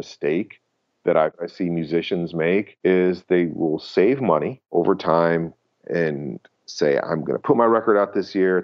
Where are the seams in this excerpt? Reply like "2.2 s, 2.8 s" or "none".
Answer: 1.4 s, 2.7 s, 4.6 s